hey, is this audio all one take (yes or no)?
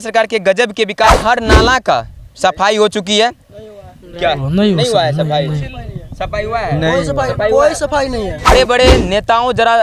no